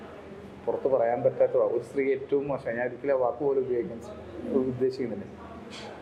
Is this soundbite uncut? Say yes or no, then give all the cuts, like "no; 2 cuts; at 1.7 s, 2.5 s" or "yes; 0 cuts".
yes; 0 cuts